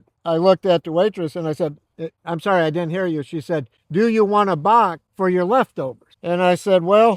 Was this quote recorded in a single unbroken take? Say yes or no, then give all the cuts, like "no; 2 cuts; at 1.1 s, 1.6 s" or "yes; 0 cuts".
yes; 0 cuts